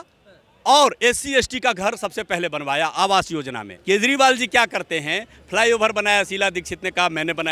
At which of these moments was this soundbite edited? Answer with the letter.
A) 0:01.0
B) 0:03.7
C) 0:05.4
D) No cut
B